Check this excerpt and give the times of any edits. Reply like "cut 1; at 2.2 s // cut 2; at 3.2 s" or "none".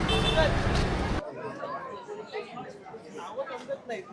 cut 1; at 1.2 s